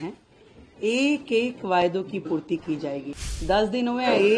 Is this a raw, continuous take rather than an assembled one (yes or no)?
no